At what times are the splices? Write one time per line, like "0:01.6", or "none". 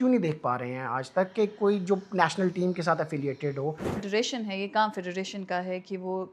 0:04.0